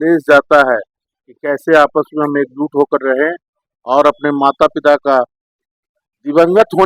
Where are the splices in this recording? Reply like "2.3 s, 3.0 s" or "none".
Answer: none

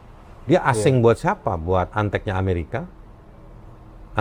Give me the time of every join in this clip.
none

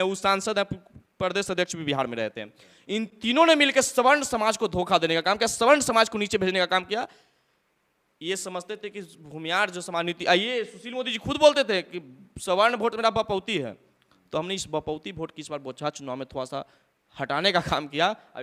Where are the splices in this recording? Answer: none

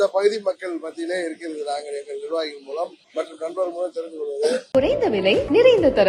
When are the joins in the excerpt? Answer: 3.0 s, 4.6 s

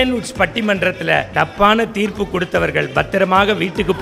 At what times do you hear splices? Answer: 1.3 s

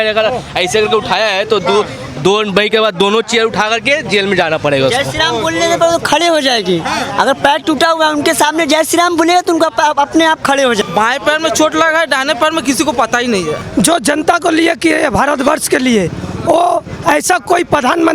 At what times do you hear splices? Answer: 10.9 s, 13.6 s

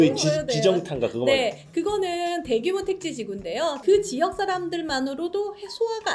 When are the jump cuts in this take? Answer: 3.8 s

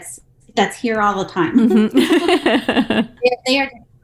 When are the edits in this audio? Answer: 3.1 s

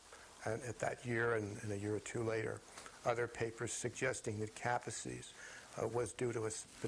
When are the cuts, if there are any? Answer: 2.4 s

